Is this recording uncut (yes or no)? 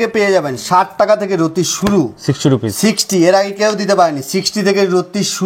yes